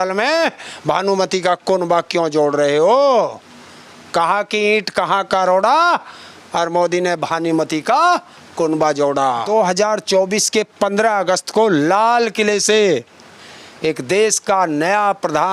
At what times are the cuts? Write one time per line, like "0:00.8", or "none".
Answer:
0:09.4

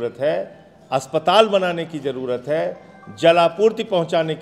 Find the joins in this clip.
none

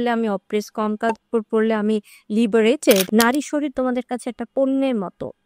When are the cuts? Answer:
0:03.1

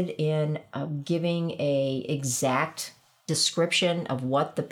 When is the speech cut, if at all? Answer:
none

